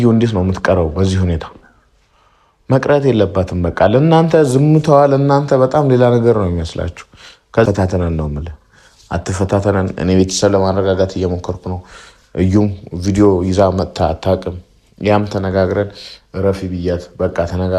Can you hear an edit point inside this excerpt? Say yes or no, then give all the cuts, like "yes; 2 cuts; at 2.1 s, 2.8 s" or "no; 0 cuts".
yes; 1 cut; at 7.6 s